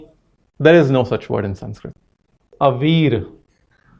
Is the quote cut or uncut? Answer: cut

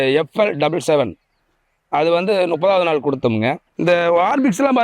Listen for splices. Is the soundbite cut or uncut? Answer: cut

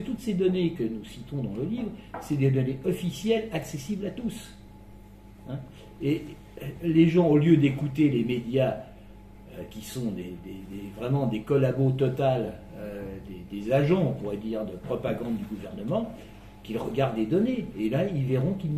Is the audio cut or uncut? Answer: uncut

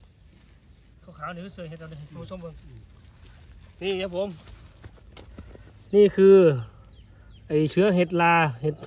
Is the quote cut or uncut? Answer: uncut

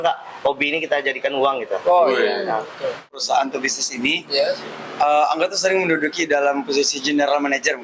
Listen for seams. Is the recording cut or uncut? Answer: cut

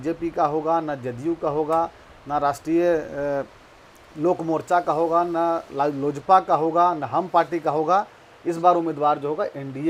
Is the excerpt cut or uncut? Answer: uncut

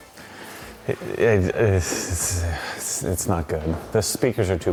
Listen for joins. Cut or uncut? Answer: uncut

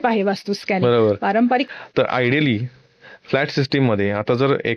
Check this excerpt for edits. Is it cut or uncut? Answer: cut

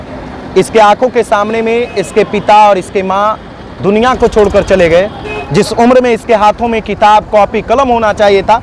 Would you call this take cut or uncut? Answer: uncut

